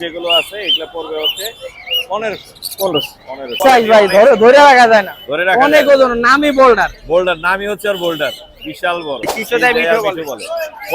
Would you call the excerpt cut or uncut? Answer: cut